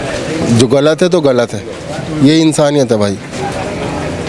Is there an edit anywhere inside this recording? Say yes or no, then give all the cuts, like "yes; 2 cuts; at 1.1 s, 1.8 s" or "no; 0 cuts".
no; 0 cuts